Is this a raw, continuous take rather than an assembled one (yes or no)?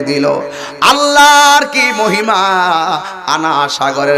yes